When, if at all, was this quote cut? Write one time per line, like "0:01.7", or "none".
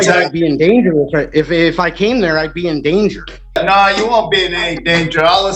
0:03.6